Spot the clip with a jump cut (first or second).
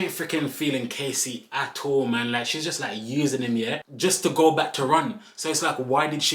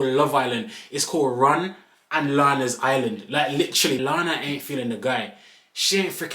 second